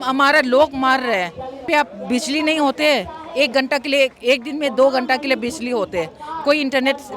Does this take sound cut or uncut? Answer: cut